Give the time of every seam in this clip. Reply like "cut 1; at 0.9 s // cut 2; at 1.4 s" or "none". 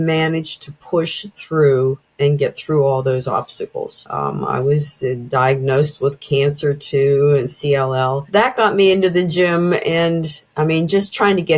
cut 1; at 8.2 s

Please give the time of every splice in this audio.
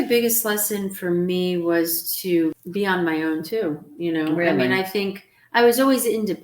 cut 1; at 2.6 s

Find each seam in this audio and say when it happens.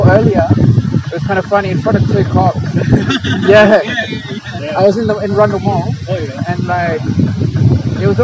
none

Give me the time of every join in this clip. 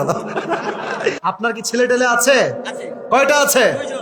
cut 1; at 1.2 s

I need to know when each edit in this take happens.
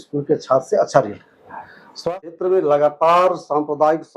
cut 1; at 2.0 s

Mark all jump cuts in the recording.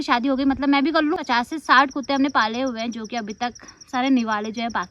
cut 1; at 1.2 s

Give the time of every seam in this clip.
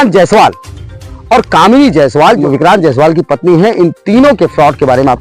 cut 1; at 2.4 s

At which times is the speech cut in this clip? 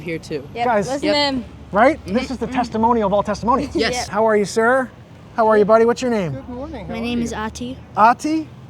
cut 1; at 4.1 s

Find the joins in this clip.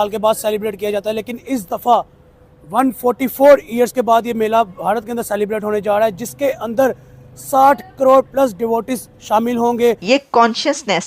cut 1; at 10.0 s

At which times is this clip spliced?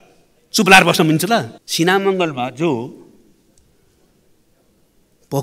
cut 1; at 1.6 s

